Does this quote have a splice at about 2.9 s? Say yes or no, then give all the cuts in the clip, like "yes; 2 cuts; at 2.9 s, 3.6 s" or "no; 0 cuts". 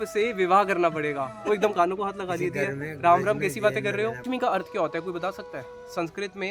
no; 1 cut; at 4.2 s